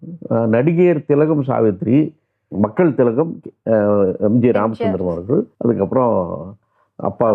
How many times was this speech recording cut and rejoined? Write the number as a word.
one